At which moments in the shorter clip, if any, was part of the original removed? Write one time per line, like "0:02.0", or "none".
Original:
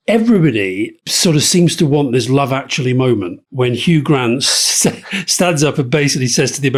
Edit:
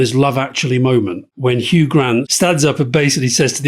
0:02.3

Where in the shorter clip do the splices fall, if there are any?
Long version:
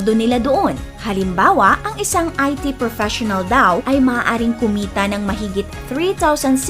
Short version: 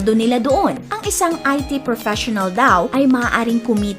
0:00.9

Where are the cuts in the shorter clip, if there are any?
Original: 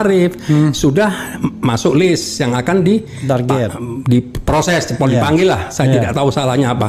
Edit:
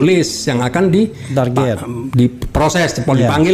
none

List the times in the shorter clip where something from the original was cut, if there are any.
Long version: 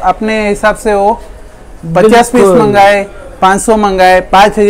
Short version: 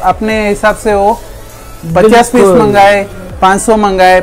none

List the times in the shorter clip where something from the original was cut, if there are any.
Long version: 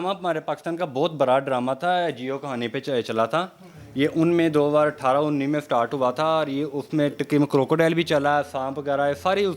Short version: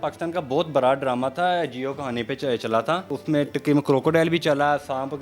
0:03.1

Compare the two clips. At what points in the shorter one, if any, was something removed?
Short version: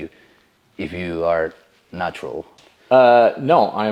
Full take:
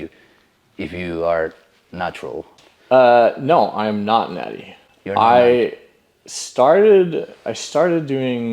none

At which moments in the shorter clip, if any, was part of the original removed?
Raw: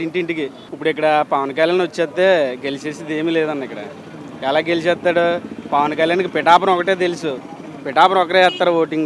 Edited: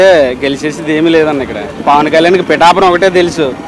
0:01.7

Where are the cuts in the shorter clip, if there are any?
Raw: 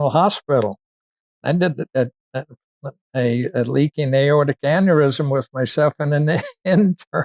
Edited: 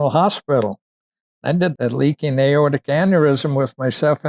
0:01.8

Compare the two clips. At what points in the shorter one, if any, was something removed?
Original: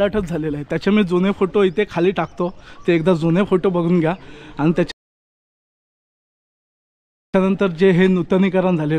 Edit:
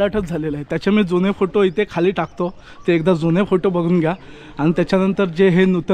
0:04.9

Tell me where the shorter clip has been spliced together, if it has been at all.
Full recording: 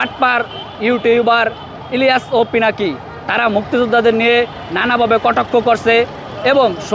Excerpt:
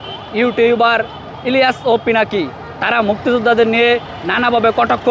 none

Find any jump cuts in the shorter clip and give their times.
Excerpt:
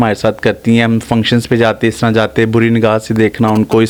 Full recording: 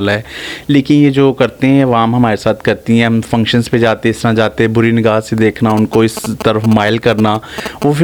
none

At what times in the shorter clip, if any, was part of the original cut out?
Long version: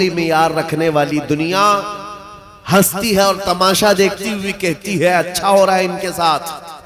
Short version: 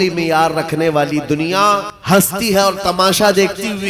0:01.9

